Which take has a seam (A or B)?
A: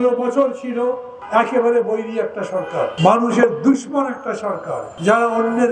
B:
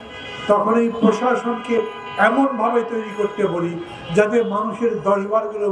A